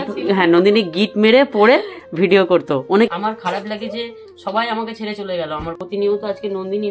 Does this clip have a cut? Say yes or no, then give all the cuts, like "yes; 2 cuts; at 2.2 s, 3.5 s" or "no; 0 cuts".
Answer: yes; 2 cuts; at 3.1 s, 5.8 s